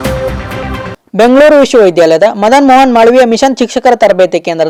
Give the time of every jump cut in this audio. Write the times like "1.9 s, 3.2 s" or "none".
none